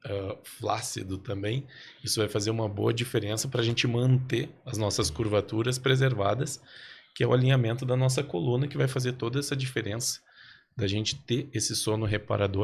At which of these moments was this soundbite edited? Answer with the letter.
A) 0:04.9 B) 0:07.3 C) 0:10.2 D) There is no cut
D